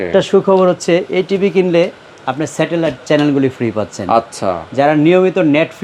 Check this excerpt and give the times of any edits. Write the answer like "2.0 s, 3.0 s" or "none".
none